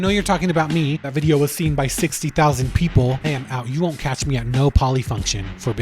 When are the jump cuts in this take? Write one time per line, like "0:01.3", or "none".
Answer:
0:01.0
0:03.2

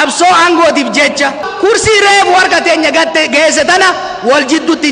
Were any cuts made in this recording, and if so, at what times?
0:01.5

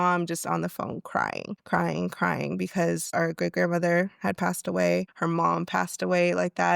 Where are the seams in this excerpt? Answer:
0:01.5
0:03.0
0:05.1

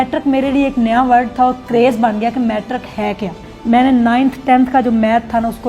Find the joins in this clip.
0:03.5

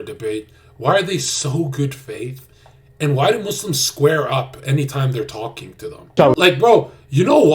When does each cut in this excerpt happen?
0:06.1

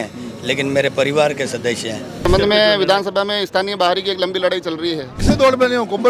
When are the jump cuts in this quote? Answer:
0:02.3
0:05.2

